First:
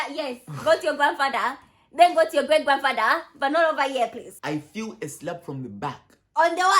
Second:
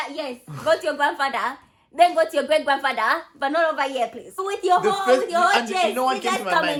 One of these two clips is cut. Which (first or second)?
first